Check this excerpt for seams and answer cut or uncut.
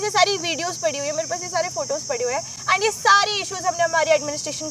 uncut